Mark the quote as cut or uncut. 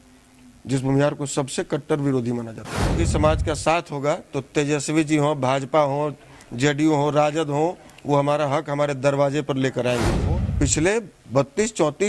cut